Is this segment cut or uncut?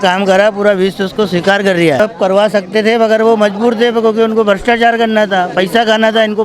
cut